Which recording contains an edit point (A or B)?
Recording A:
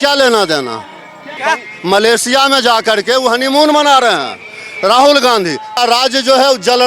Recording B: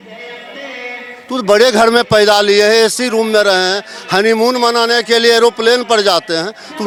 A